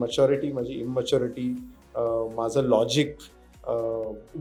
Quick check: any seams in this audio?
no; 0 cuts

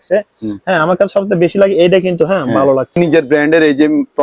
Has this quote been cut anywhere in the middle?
yes; 1 cut; at 3.0 s

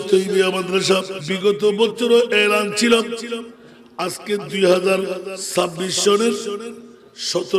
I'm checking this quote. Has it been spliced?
yes; 2 cuts; at 1.2 s, 5.3 s

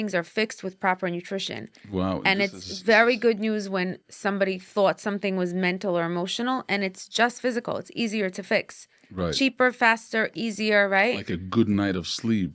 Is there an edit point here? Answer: no; 0 cuts

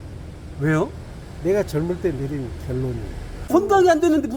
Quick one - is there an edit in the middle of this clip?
yes; 1 cut; at 3.4 s

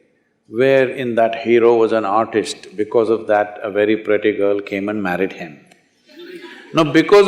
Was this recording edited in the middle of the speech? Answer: no; 0 cuts

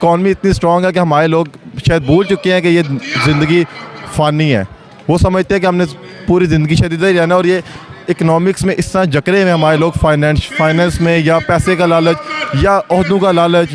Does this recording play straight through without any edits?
yes; 0 cuts

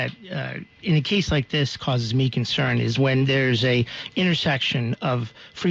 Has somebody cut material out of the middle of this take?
no; 0 cuts

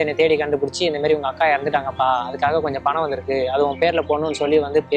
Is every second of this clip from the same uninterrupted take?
yes; 0 cuts

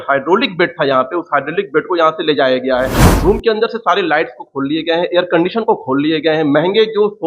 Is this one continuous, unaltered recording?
yes; 0 cuts

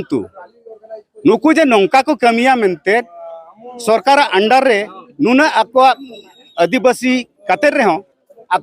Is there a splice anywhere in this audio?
no; 0 cuts

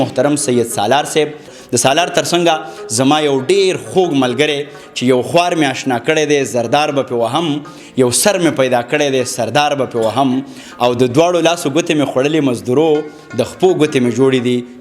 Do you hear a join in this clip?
yes; 1 cut; at 1.5 s

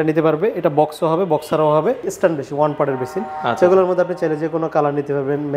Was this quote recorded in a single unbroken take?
no; 1 cut; at 2.1 s

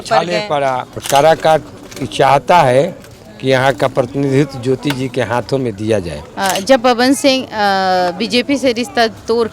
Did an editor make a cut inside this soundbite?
yes; 2 cuts; at 1.0 s, 6.2 s

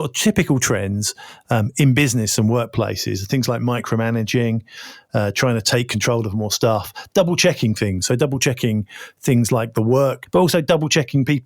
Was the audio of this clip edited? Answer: yes; 1 cut; at 10.2 s

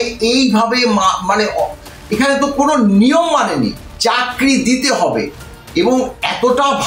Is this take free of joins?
no; 1 cut; at 3.9 s

